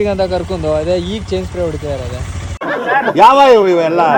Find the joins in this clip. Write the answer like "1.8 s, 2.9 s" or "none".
none